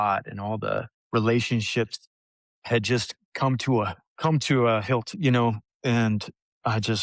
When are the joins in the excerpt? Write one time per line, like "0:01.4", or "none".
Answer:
0:01.0